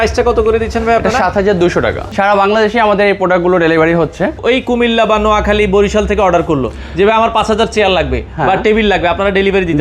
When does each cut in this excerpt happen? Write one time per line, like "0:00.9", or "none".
0:02.0
0:04.4